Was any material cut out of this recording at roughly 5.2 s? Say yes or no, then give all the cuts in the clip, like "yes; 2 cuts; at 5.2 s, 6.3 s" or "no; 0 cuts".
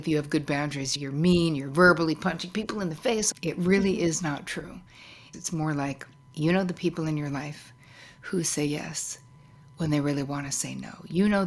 yes; 3 cuts; at 0.9 s, 3.3 s, 5.2 s